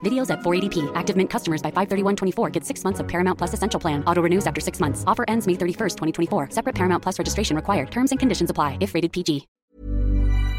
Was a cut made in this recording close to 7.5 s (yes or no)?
no